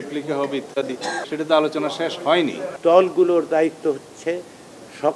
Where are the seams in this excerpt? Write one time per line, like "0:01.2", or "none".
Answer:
0:01.2
0:02.7